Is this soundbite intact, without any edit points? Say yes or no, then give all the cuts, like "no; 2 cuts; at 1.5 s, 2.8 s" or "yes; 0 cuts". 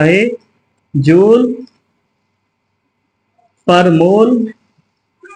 yes; 0 cuts